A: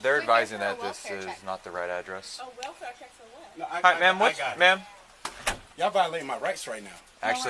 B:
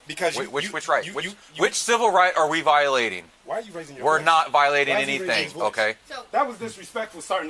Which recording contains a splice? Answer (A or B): B